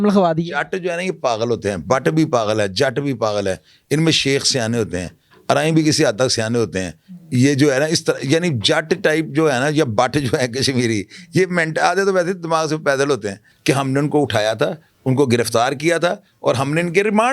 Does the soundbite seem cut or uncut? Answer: cut